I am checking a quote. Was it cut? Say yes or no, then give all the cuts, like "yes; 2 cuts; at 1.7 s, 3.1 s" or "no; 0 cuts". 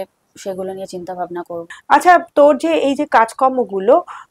no; 0 cuts